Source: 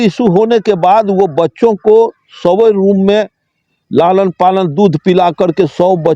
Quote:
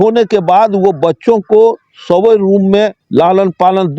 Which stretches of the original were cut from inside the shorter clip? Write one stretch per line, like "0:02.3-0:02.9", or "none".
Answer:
0:03.3-0:03.8